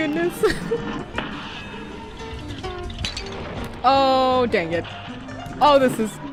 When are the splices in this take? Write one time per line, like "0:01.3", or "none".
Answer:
none